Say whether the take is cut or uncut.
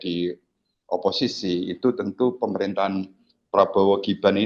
uncut